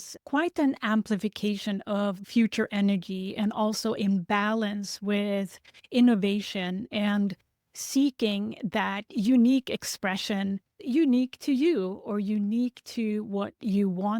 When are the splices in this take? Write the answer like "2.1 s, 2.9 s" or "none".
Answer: 2.2 s